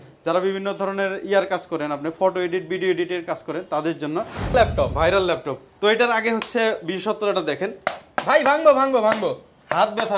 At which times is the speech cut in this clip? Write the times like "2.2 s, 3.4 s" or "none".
4.5 s